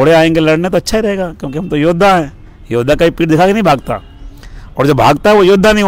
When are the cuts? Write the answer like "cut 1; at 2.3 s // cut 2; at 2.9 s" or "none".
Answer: none